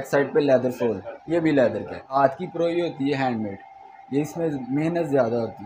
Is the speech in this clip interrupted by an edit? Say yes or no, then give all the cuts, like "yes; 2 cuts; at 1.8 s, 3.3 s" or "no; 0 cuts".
yes; 1 cut; at 2.2 s